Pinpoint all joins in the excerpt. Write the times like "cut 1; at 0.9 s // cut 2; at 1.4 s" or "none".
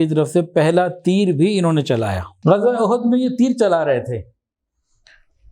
cut 1; at 2.2 s